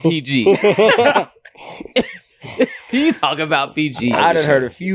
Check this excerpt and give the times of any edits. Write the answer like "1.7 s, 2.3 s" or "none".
none